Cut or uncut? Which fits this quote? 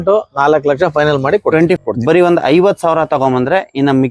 cut